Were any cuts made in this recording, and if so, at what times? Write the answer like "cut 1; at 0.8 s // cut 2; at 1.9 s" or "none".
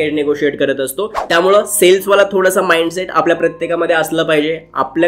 none